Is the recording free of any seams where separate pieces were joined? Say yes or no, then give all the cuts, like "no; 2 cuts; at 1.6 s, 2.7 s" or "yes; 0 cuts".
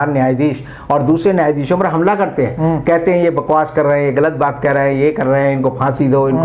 yes; 0 cuts